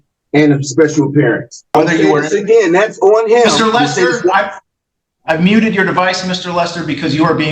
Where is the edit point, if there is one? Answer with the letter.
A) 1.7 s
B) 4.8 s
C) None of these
A